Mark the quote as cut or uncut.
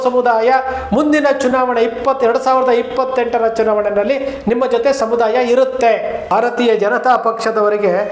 cut